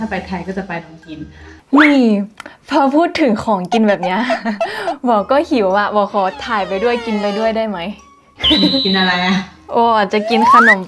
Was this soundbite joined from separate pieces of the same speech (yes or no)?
no